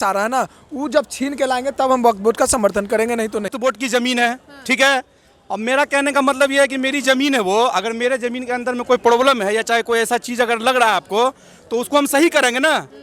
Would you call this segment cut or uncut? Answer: cut